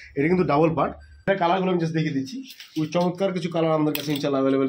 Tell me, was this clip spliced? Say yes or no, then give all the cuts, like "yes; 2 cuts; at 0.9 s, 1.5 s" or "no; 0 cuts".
yes; 1 cut; at 1.1 s